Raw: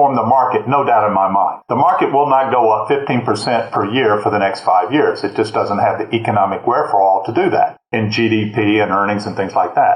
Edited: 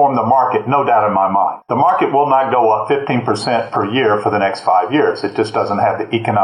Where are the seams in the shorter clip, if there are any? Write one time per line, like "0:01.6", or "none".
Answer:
none